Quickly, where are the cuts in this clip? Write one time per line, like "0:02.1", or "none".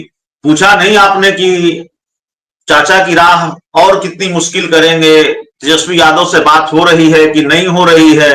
none